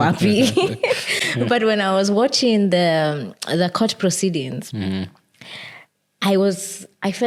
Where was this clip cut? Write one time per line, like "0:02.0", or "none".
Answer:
none